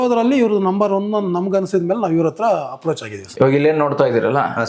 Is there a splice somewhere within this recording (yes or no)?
yes